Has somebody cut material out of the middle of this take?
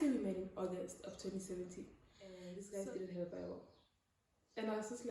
yes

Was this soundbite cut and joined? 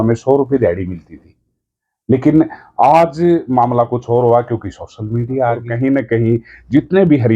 yes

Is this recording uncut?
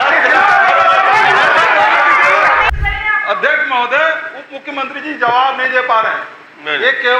no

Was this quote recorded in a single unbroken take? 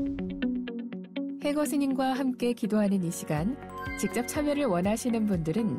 no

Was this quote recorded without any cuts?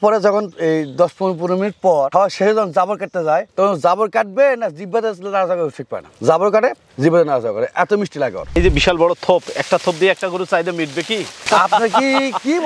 no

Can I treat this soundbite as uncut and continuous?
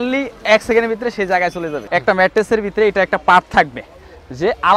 no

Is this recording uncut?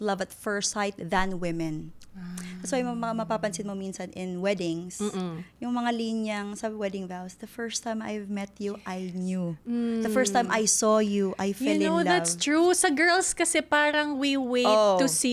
yes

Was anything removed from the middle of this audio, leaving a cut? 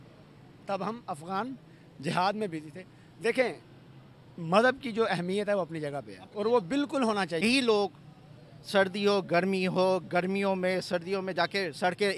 yes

